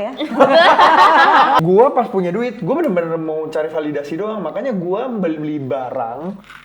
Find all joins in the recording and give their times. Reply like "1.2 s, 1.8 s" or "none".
1.6 s